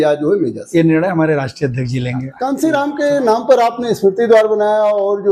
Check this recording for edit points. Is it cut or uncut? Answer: cut